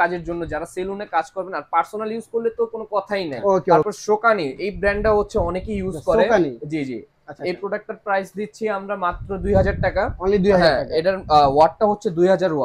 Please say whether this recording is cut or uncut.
cut